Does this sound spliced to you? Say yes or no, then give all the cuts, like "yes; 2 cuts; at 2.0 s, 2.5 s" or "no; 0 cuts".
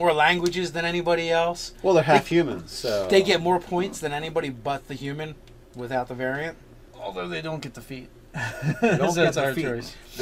yes; 1 cut; at 3.5 s